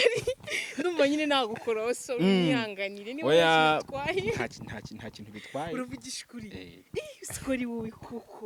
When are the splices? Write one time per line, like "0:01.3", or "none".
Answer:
none